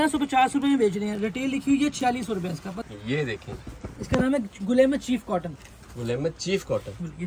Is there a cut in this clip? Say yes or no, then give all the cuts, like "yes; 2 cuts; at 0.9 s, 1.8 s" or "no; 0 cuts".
yes; 1 cut; at 2.7 s